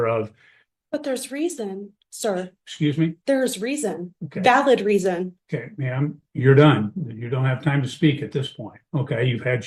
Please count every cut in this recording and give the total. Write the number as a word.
zero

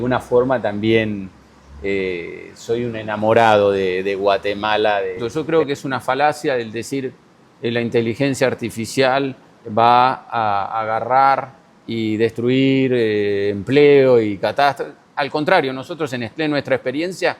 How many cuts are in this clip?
one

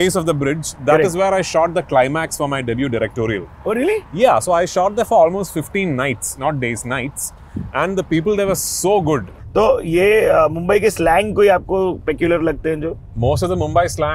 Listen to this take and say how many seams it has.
two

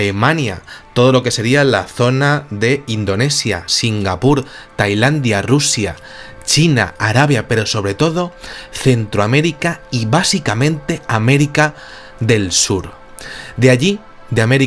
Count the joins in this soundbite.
one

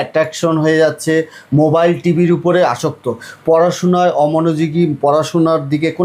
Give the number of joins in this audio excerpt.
zero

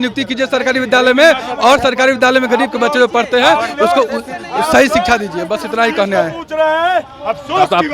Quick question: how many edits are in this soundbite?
zero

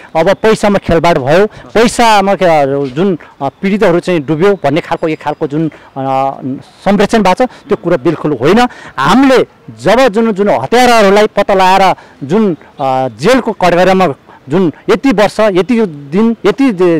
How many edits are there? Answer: zero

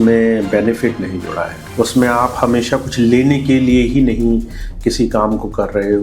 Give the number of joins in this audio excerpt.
one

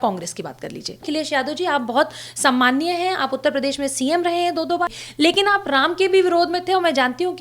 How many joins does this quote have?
two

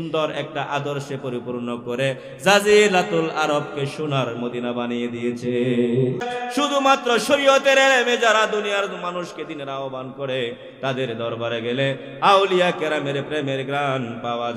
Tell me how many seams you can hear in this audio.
one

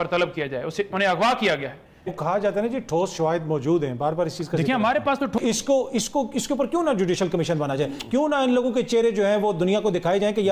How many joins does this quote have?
two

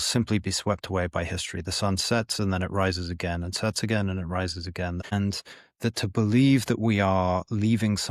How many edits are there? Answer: one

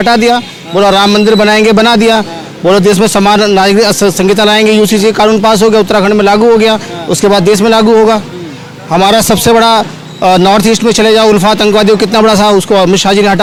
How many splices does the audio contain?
zero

